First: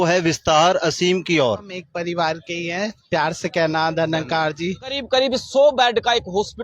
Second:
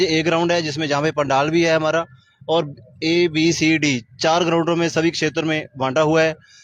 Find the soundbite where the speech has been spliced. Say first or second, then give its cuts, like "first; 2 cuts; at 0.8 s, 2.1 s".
first; 2 cuts; at 1.8 s, 5.0 s